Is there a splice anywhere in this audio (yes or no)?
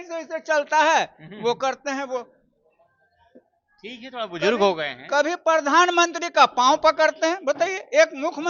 no